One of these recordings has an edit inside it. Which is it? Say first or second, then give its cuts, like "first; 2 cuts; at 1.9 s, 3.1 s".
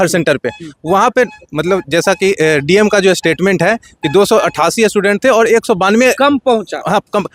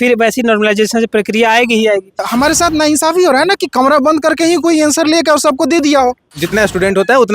second; 2 cuts; at 2.2 s, 6.4 s